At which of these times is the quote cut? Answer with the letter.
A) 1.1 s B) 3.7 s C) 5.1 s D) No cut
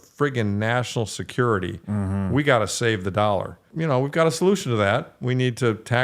B